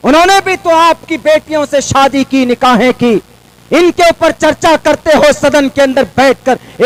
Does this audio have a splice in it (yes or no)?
no